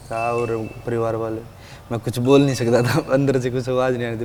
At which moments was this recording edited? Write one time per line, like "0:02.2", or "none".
none